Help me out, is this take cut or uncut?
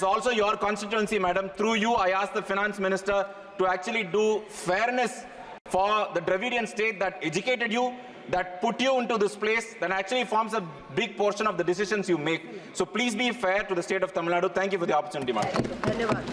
uncut